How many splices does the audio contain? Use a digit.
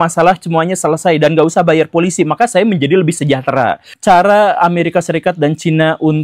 1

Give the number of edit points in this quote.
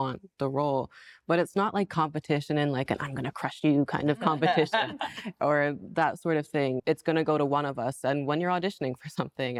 0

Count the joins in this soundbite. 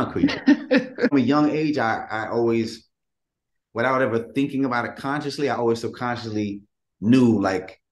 1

